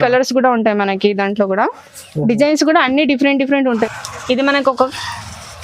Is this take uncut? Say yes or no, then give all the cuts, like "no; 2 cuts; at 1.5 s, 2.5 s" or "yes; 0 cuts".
no; 1 cut; at 3.9 s